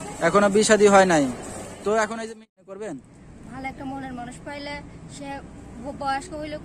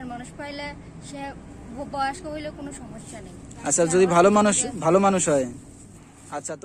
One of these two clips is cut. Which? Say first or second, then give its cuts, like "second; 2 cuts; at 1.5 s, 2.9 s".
first; 1 cut; at 2.2 s